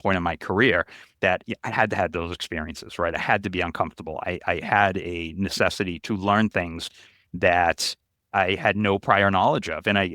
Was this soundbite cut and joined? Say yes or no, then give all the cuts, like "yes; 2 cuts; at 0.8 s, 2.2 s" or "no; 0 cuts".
yes; 2 cuts; at 6.0 s, 8.3 s